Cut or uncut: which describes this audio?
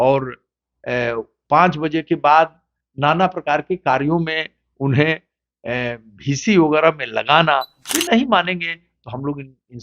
cut